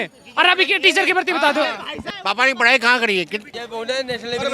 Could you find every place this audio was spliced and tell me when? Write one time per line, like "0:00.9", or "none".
0:01.9
0:03.6